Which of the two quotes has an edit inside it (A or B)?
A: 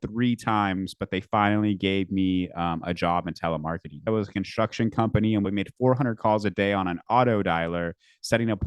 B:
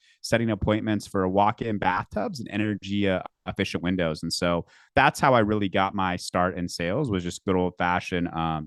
A